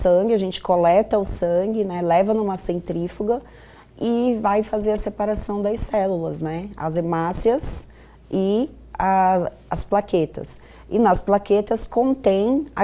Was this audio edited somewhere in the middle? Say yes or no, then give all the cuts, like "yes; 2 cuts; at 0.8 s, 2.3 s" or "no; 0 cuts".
no; 0 cuts